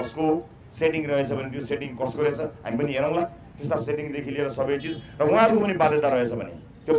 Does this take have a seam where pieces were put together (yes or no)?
no